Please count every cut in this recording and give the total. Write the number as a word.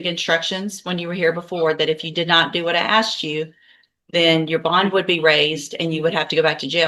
zero